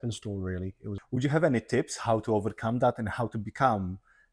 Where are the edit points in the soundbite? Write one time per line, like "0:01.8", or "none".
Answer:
0:00.9